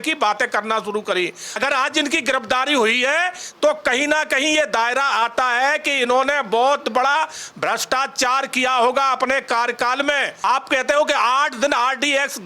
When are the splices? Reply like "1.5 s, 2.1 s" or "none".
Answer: 1.5 s, 10.3 s